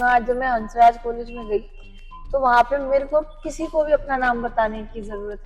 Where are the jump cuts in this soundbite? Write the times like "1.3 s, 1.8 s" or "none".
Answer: none